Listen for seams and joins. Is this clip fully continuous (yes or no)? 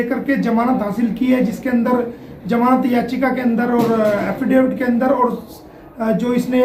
no